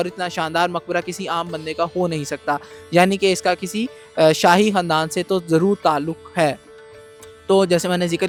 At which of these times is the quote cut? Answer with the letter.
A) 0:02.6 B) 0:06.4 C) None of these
C